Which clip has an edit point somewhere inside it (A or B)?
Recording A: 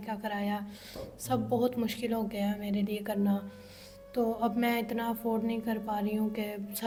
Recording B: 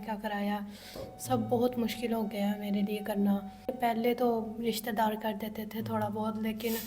B